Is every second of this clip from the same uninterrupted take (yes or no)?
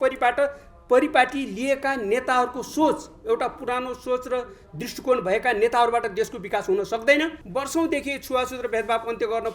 no